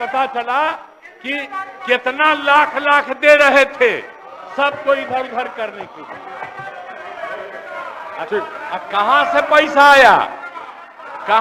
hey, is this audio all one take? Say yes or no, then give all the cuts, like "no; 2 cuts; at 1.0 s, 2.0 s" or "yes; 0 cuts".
yes; 0 cuts